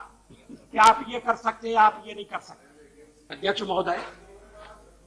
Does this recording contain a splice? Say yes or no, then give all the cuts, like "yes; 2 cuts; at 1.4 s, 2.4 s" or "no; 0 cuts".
yes; 1 cut; at 3.2 s